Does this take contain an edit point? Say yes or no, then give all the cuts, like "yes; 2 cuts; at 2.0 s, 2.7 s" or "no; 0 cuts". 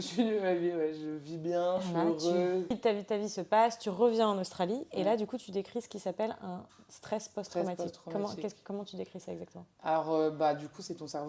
yes; 1 cut; at 2.8 s